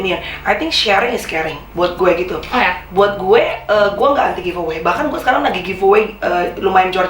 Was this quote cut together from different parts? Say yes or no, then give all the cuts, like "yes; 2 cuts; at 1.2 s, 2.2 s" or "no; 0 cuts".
no; 0 cuts